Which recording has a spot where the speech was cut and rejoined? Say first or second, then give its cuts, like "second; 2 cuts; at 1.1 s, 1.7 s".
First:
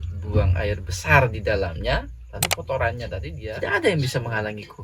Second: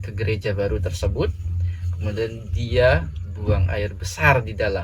first; 1 cut; at 3.2 s